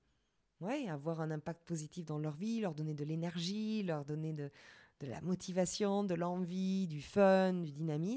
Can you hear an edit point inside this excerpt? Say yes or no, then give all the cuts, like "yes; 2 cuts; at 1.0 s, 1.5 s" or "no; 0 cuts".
no; 0 cuts